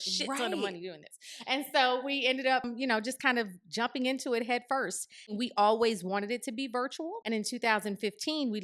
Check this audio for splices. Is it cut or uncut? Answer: cut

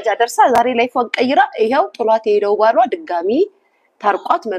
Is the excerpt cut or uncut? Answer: uncut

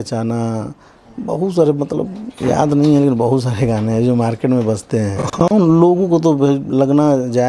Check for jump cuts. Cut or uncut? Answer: cut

